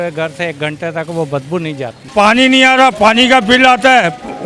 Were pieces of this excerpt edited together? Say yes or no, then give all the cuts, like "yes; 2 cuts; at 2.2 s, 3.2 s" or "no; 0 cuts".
yes; 1 cut; at 2.0 s